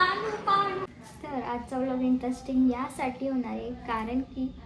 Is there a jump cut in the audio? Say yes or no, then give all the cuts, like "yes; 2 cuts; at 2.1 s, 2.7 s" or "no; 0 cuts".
yes; 1 cut; at 1.0 s